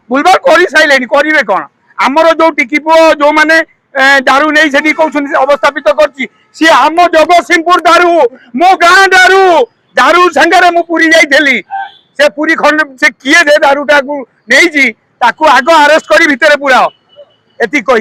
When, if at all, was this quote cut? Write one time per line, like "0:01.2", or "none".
none

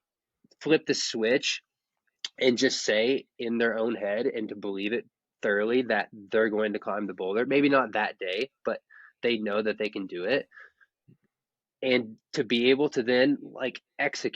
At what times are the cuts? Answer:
0:03.3

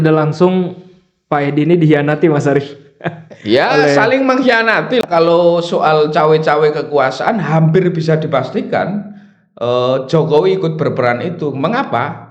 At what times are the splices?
0:05.0

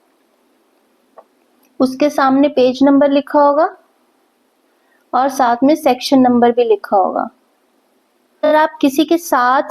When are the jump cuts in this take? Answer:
0:08.4

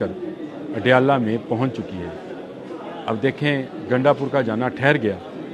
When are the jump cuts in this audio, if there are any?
none

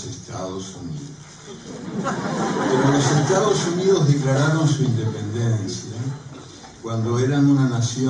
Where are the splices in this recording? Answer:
0:05.2

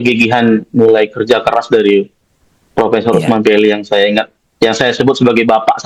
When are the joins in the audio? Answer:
none

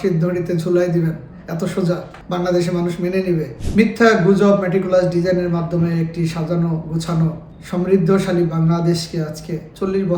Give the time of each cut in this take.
0:03.6

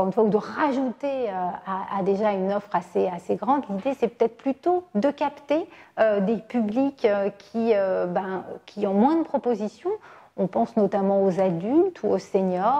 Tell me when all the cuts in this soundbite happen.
none

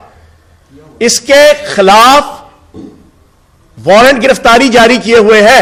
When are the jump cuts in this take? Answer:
none

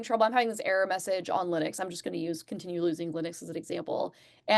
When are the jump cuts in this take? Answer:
none

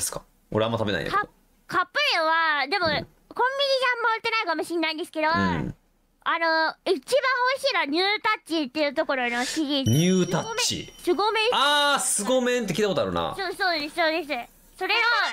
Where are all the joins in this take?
none

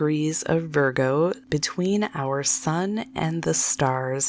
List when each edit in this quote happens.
0:01.4

